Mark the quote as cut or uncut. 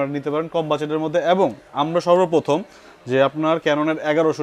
uncut